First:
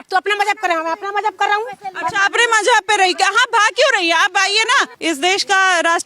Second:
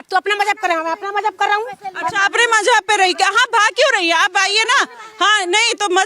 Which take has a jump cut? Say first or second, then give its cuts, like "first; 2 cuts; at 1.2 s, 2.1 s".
first; 1 cut; at 4.9 s